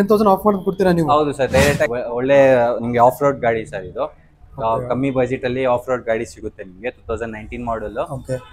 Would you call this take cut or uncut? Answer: cut